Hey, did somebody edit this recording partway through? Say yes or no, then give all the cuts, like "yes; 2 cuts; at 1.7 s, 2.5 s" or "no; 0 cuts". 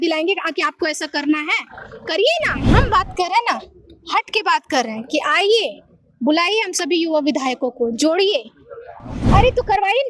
yes; 2 cuts; at 2.6 s, 9.2 s